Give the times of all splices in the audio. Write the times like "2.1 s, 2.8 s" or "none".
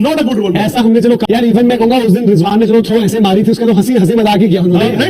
1.2 s

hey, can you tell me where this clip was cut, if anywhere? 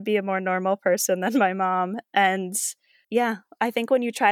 none

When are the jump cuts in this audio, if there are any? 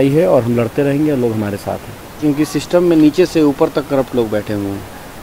2.2 s

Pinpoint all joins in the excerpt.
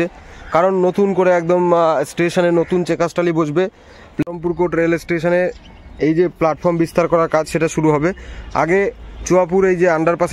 4.2 s

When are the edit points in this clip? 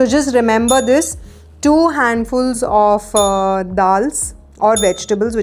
none

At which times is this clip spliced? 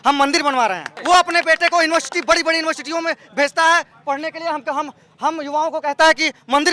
0.9 s

